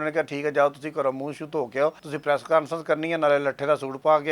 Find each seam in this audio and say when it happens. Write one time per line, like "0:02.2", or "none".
0:02.1